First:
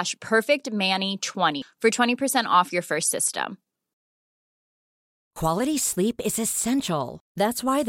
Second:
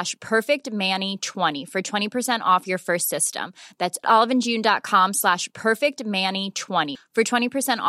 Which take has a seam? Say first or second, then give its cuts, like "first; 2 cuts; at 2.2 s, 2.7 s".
second; 1 cut; at 1.5 s